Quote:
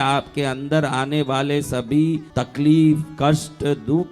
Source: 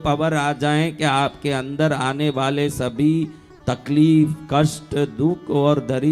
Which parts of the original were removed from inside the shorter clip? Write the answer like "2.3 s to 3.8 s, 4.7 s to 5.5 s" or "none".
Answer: 3.4 s to 3.7 s